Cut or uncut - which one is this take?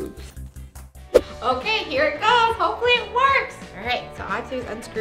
uncut